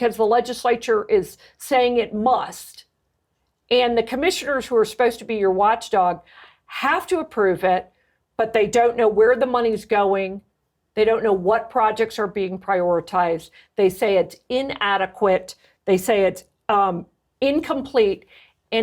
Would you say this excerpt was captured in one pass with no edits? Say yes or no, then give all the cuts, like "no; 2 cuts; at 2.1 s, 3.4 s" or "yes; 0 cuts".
yes; 0 cuts